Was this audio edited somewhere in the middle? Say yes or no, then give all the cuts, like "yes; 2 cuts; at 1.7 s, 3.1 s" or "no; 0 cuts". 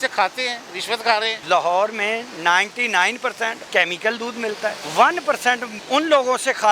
yes; 4 cuts; at 1.4 s, 3.6 s, 4.8 s, 5.7 s